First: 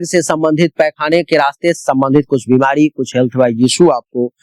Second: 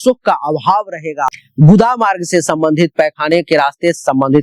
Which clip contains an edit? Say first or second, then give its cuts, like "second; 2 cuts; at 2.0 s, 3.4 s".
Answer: second; 1 cut; at 1.3 s